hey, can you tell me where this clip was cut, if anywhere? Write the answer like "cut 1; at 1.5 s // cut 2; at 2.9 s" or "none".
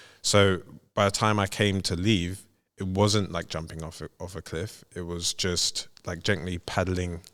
none